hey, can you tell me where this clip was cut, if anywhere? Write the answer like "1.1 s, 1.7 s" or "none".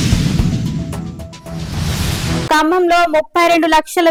none